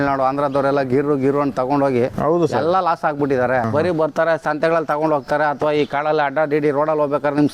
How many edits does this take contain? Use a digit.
1